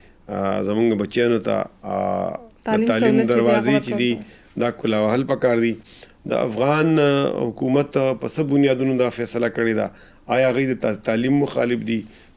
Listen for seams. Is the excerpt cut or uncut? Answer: uncut